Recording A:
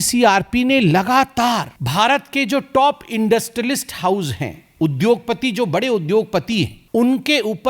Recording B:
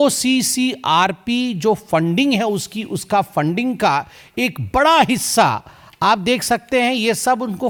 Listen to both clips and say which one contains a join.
A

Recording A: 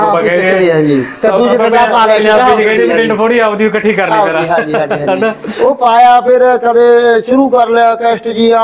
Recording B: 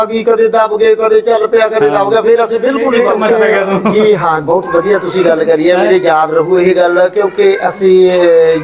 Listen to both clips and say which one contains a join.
B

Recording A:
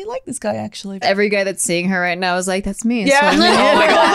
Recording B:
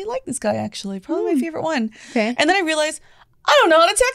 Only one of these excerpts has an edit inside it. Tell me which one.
A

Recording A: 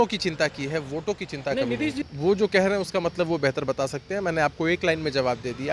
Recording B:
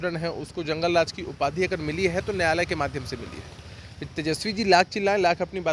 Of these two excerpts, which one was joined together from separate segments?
A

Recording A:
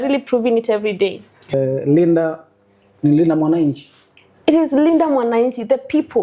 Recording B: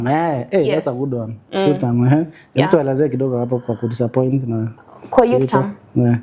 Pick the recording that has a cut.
A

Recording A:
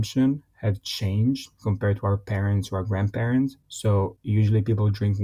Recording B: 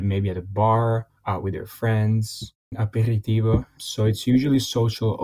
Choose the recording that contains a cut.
B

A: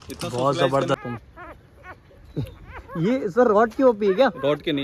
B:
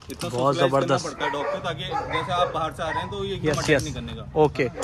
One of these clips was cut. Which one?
A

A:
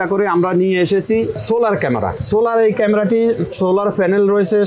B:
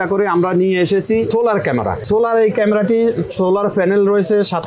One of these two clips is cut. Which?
B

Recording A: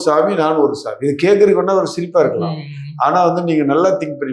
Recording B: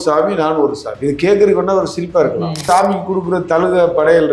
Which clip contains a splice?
B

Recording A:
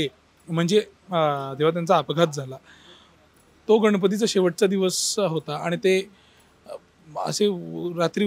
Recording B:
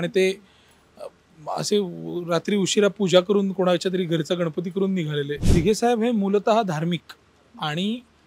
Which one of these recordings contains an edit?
B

